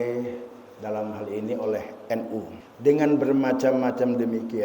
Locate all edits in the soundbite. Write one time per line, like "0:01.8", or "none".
0:02.6